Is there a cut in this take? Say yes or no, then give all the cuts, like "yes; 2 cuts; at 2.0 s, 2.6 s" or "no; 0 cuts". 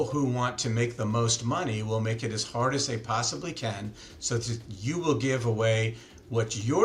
no; 0 cuts